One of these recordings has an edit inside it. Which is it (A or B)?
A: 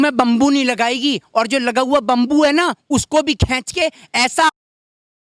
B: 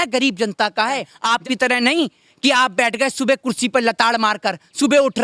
B